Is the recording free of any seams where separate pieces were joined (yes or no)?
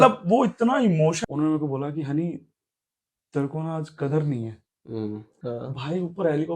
no